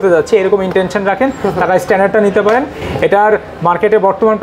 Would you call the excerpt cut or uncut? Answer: uncut